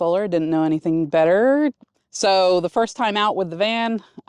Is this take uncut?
no; 1 cut; at 2.0 s

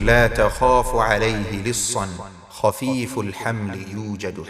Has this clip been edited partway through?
no; 0 cuts

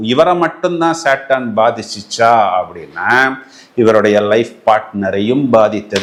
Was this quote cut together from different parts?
no; 0 cuts

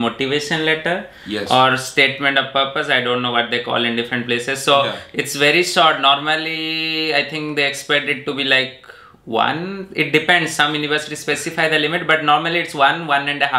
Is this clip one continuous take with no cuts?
yes; 0 cuts

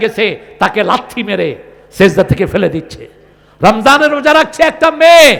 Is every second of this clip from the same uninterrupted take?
yes; 0 cuts

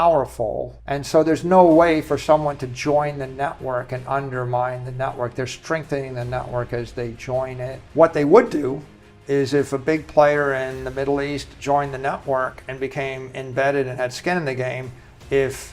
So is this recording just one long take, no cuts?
no; 1 cut; at 7.8 s

